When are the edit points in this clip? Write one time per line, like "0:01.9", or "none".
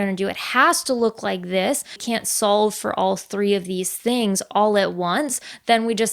0:02.0